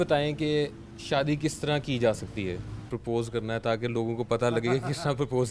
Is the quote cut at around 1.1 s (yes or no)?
no